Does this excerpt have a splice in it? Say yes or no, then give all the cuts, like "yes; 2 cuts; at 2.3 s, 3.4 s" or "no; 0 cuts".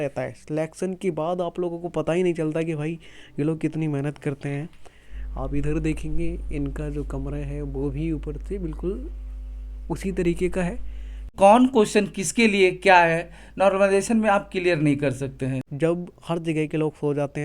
yes; 2 cuts; at 11.3 s, 15.6 s